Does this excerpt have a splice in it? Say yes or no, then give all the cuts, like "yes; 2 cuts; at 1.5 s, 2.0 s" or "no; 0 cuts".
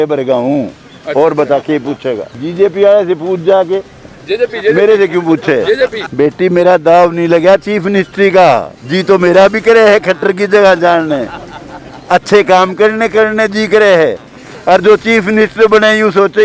yes; 2 cuts; at 2.3 s, 6.0 s